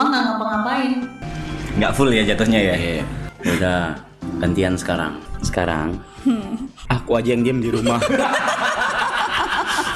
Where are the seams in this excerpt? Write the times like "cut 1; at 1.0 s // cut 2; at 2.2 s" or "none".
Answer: cut 1; at 1.2 s // cut 2; at 3.2 s // cut 3; at 4.1 s // cut 4; at 5.3 s // cut 5; at 6.7 s

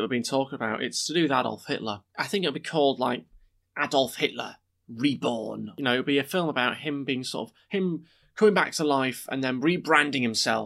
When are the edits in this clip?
cut 1; at 2.1 s // cut 2; at 5.7 s

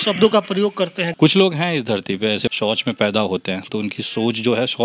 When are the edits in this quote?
cut 1; at 1.0 s // cut 2; at 2.5 s

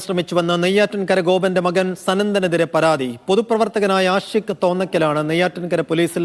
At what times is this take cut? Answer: none

